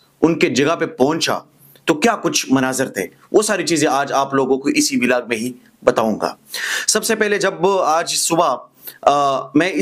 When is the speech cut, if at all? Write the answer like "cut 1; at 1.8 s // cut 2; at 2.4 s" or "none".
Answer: none